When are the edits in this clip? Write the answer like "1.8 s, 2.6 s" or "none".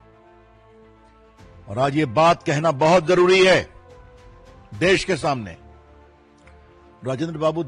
5.6 s, 7.0 s